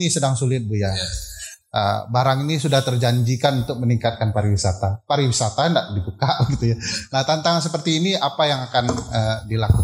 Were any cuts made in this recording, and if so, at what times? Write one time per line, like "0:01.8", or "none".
none